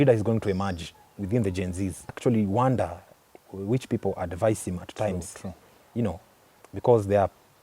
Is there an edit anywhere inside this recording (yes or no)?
yes